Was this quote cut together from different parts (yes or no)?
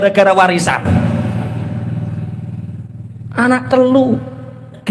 no